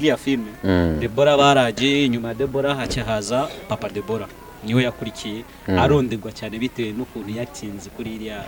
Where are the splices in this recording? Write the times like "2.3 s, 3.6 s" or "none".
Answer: none